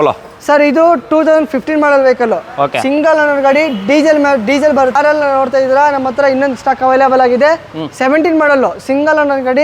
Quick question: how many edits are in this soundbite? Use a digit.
1